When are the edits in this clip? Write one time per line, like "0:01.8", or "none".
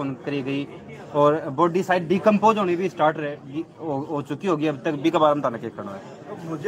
none